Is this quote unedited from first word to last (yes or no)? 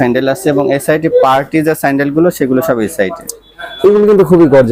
yes